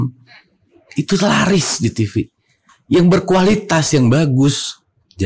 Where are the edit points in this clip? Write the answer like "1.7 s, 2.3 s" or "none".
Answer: none